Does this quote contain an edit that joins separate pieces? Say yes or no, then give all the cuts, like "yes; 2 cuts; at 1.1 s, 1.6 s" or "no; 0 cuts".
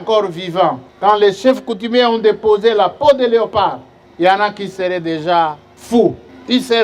no; 0 cuts